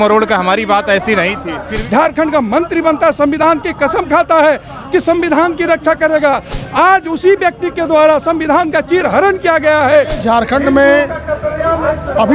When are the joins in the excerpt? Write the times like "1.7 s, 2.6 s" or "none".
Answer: 1.7 s, 10.2 s